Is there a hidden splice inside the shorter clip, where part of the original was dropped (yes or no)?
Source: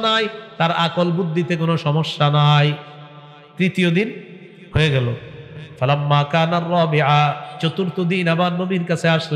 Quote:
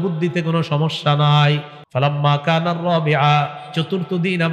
yes